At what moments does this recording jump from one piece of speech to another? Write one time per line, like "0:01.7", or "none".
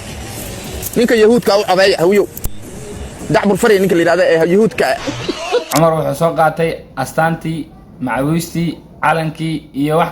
0:05.7